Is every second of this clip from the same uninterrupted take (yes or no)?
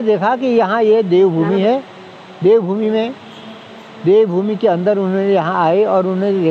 yes